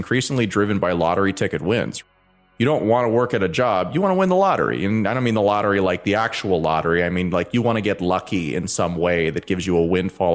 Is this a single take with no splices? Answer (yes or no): no